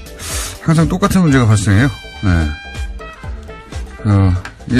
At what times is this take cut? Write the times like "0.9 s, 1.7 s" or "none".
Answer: 2.1 s

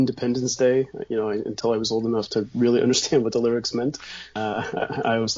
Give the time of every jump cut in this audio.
4.4 s

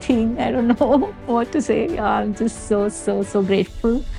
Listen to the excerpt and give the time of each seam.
none

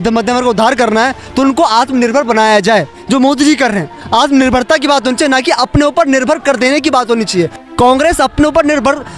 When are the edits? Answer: none

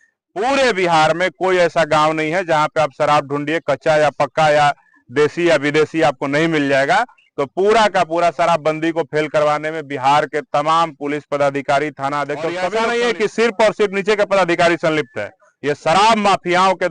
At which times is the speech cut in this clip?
12.7 s

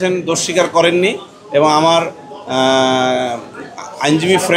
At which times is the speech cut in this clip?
none

